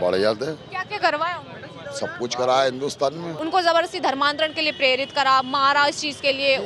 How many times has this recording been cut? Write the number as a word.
one